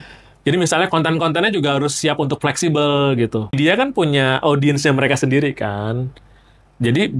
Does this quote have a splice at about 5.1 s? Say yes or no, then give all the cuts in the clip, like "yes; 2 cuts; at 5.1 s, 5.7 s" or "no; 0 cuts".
no; 1 cut; at 3.5 s